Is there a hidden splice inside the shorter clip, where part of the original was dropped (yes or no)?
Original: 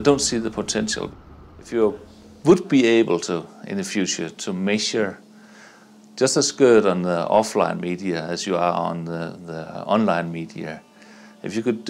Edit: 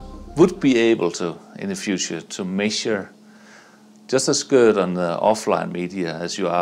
no